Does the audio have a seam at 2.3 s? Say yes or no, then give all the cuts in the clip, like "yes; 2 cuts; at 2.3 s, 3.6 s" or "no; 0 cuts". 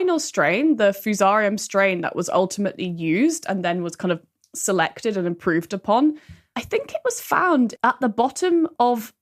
no; 1 cut; at 7.7 s